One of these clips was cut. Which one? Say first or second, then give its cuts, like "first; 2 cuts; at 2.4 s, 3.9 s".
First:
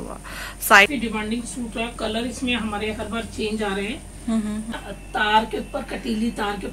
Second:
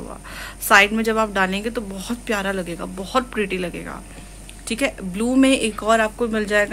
first; 2 cuts; at 0.9 s, 4.7 s